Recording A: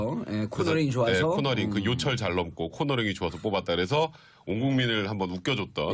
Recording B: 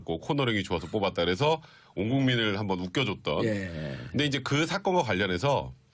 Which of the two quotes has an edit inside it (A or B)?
A